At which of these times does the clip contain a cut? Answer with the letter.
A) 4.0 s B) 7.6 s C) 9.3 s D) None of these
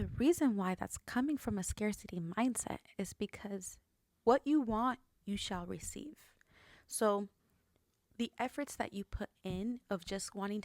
A